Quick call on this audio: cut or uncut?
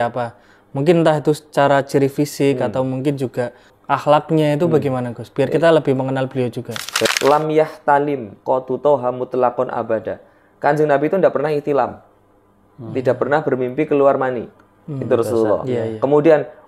cut